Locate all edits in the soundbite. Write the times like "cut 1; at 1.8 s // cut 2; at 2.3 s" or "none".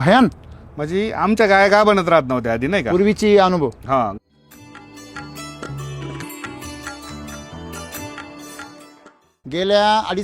cut 1; at 4.1 s // cut 2; at 8.8 s